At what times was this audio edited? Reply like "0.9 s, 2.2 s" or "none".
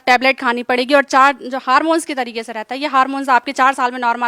none